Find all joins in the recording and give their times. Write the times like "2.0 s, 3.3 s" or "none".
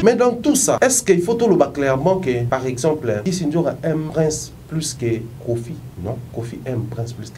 0.8 s, 2.5 s, 3.2 s, 4.1 s, 5.9 s